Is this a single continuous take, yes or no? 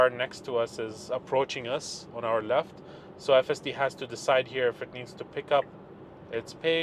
yes